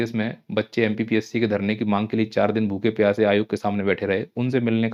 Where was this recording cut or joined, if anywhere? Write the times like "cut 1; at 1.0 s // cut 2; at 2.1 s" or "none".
none